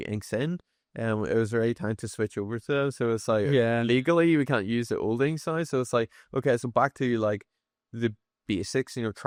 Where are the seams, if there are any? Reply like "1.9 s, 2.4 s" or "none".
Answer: none